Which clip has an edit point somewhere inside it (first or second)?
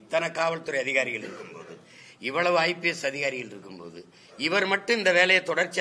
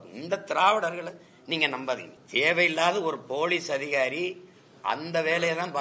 second